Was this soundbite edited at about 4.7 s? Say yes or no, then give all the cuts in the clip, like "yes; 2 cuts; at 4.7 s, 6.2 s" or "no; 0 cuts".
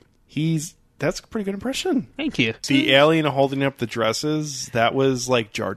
no; 1 cut; at 2.6 s